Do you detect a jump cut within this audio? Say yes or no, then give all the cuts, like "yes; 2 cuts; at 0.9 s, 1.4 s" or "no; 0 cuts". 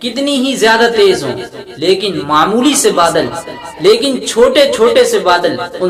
no; 0 cuts